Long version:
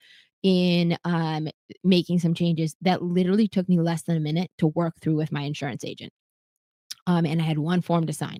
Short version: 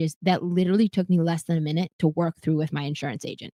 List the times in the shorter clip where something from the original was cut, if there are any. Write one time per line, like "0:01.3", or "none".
none